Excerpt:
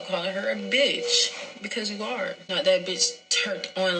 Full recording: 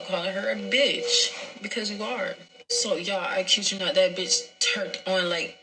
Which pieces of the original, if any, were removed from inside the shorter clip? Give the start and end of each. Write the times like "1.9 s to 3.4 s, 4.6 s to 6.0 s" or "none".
2.4 s to 3.7 s